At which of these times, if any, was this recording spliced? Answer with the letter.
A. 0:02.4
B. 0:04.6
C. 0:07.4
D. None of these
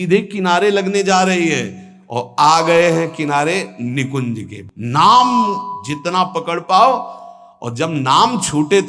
B